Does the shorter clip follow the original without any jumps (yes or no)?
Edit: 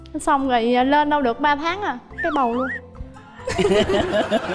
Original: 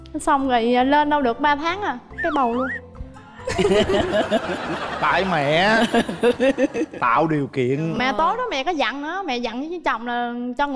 yes